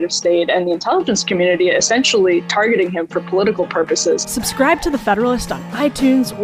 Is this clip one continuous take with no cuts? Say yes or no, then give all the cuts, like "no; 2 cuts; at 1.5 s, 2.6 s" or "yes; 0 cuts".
no; 1 cut; at 4.4 s